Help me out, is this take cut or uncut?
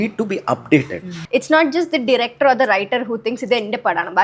cut